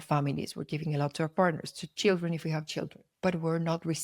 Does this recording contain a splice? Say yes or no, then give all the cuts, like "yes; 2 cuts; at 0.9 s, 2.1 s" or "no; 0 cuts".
yes; 1 cut; at 3.0 s